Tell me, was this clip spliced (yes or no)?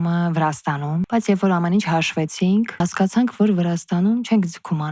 yes